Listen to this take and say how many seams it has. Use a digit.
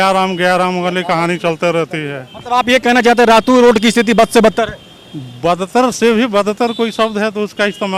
0